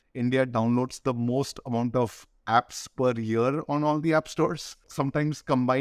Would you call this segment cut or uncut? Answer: cut